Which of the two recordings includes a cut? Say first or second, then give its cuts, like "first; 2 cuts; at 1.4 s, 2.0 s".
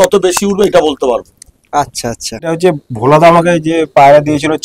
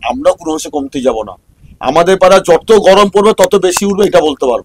first; 1 cut; at 2.3 s